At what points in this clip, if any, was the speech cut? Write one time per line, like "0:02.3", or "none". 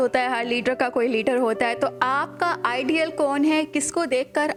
none